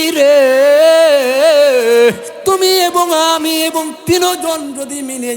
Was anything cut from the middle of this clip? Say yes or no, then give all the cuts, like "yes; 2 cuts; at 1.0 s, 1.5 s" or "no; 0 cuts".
yes; 1 cut; at 2.3 s